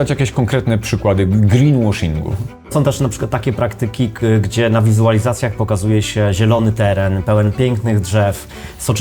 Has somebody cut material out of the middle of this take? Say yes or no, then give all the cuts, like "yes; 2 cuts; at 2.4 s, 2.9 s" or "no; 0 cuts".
yes; 1 cut; at 2.7 s